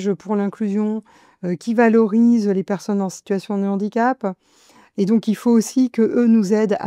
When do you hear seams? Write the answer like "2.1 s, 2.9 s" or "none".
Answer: none